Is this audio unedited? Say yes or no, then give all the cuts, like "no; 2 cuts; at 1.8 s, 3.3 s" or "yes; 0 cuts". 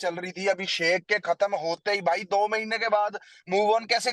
yes; 0 cuts